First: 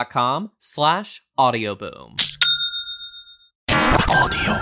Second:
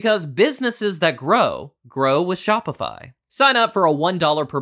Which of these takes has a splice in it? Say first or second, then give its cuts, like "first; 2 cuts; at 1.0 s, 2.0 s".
first; 1 cut; at 3.6 s